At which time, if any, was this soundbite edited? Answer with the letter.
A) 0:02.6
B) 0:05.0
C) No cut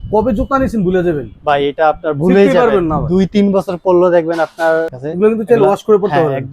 B